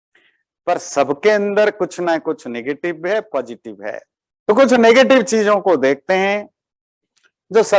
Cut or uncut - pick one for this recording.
uncut